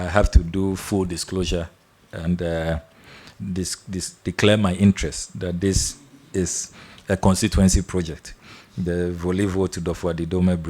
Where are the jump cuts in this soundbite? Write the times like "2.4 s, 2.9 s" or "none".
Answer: none